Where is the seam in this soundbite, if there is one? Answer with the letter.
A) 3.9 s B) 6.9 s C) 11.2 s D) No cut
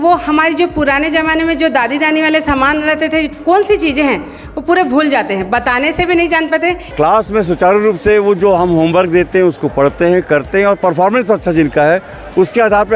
B